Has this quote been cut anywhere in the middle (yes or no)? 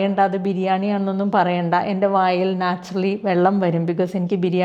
no